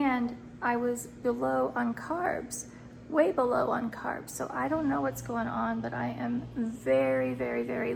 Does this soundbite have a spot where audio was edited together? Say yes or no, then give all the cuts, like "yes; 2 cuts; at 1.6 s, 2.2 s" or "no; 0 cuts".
no; 0 cuts